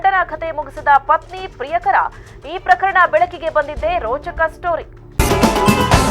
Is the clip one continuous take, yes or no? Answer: no